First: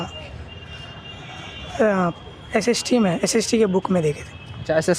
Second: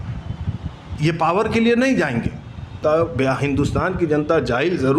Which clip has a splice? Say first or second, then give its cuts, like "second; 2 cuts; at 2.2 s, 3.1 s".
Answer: second; 1 cut; at 2.8 s